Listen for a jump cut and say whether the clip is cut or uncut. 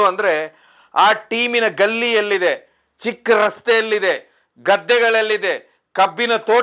uncut